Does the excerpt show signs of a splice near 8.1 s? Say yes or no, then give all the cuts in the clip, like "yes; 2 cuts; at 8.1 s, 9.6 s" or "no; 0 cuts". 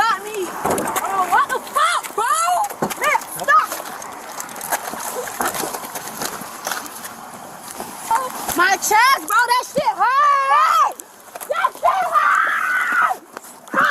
yes; 1 cut; at 8.1 s